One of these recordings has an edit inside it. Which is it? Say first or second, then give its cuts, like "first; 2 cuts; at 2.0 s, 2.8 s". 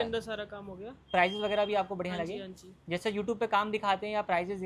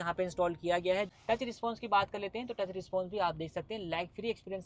second; 1 cut; at 1.1 s